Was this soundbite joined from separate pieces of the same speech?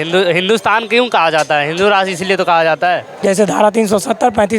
yes; 1 cut; at 3.1 s

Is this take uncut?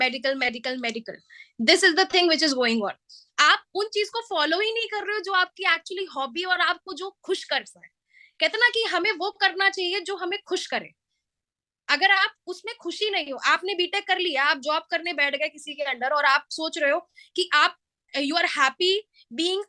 yes; 0 cuts

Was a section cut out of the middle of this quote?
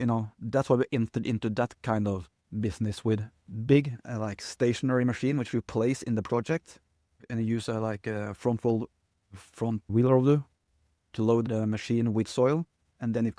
yes; 2 cuts; at 7.1 s, 11.4 s

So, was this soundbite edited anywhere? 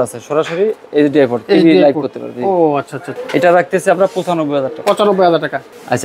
no; 0 cuts

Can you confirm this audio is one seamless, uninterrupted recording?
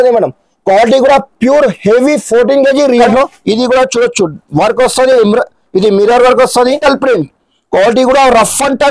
no; 2 cuts; at 3.0 s, 6.8 s

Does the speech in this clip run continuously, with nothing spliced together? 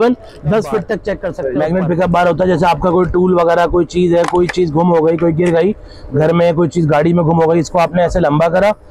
no; 1 cut; at 1.3 s

